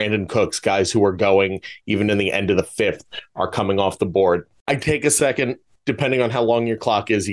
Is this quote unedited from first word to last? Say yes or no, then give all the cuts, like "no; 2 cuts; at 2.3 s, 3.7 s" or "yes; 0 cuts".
no; 2 cuts; at 4.5 s, 5.7 s